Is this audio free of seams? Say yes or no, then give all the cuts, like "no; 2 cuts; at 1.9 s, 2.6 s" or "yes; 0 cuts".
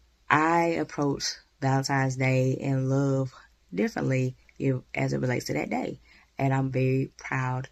yes; 0 cuts